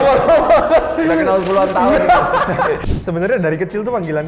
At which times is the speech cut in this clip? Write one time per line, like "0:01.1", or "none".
0:02.8